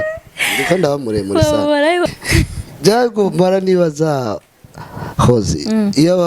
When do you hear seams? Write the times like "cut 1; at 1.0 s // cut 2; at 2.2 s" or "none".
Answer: cut 1; at 2.1 s

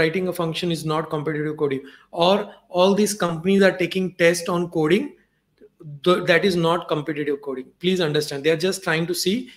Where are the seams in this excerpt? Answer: none

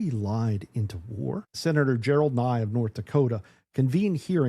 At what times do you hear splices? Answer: cut 1; at 1.5 s

